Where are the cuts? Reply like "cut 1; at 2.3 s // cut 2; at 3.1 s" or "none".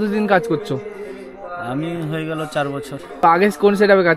cut 1; at 3.2 s